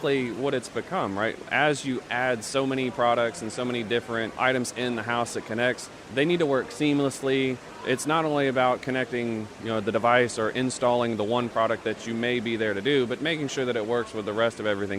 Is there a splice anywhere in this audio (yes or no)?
yes